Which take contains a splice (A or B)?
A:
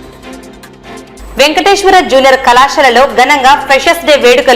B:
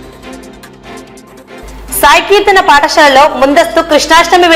A